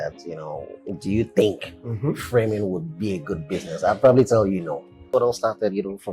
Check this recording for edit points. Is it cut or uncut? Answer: cut